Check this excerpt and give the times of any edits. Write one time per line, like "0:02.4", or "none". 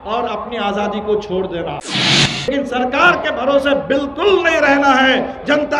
0:02.2